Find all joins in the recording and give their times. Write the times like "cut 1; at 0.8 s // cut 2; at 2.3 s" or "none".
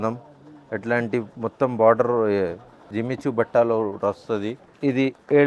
none